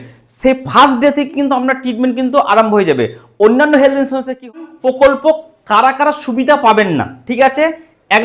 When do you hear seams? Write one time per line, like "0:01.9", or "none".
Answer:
0:04.5